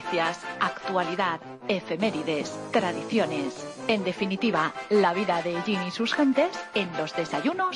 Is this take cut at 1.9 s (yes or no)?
no